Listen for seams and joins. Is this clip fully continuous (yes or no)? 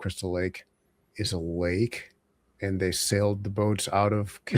no